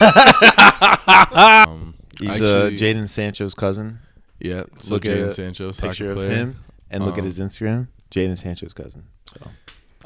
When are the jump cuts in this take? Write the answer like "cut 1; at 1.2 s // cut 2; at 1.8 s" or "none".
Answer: cut 1; at 1.6 s